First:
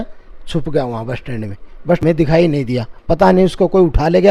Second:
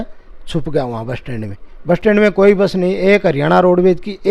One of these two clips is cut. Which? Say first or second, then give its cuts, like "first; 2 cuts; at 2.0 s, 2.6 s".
first; 1 cut; at 2.0 s